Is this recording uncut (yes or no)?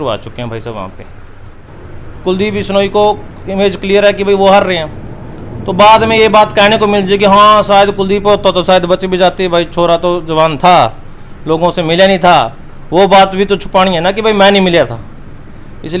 no